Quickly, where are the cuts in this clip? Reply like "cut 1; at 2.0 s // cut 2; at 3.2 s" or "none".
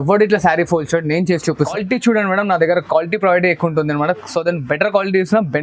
cut 1; at 1.7 s